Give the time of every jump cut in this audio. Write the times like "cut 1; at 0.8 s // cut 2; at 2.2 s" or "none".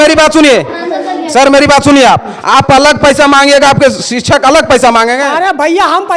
none